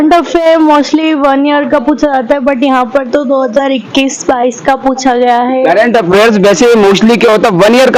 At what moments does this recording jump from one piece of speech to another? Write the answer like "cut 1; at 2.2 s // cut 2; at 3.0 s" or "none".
none